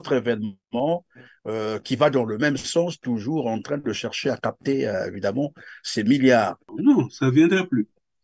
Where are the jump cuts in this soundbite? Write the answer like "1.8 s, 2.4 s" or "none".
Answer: 6.6 s